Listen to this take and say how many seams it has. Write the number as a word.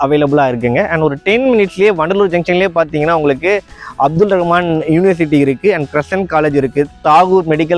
zero